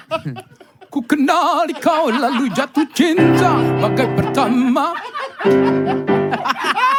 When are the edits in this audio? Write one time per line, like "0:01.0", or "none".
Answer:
none